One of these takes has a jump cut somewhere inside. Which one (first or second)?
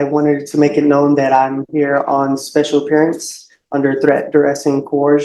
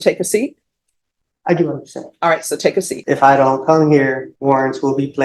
second